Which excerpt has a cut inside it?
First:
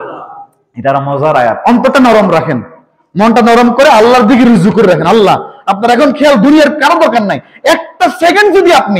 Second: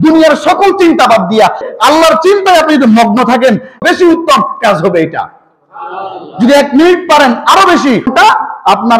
second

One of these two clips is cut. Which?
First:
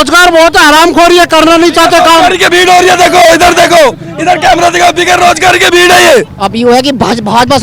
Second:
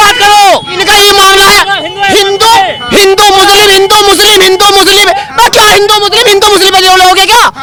first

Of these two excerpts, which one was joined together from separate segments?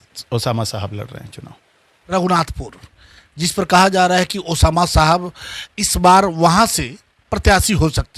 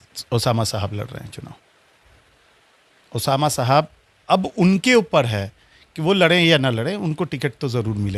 first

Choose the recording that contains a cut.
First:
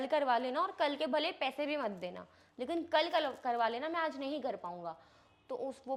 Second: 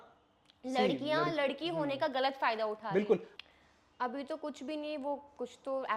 second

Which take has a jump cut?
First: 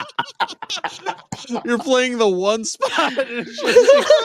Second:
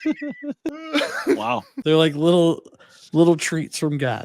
second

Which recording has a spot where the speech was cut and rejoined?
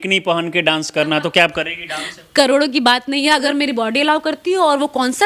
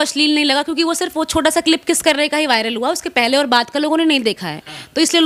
first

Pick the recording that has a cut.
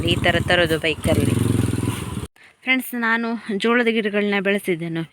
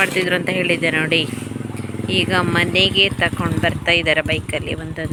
first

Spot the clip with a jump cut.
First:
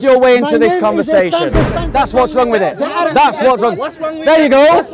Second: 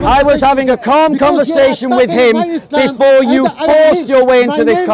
first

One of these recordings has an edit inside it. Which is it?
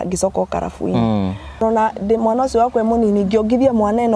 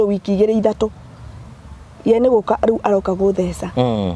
first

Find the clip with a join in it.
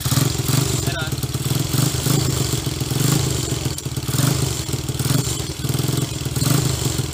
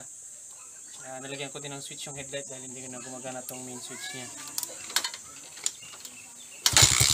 second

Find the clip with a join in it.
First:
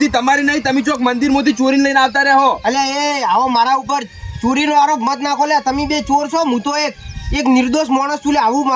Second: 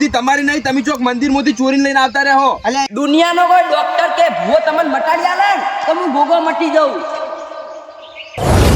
second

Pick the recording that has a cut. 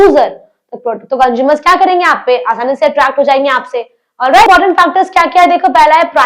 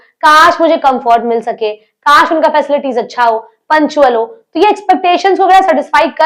first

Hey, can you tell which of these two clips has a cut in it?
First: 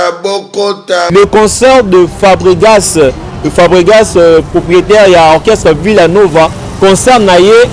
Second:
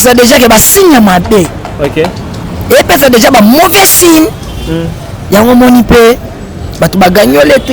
first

